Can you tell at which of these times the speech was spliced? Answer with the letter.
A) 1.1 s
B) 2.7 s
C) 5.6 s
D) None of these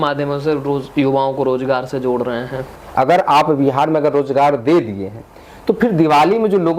B